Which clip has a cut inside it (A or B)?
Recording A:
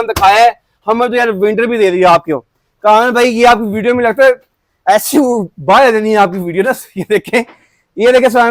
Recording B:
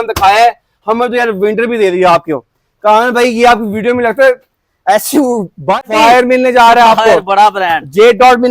B